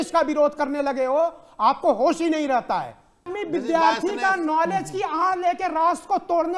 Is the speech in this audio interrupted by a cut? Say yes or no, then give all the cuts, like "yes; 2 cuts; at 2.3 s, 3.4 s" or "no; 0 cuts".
yes; 1 cut; at 3.3 s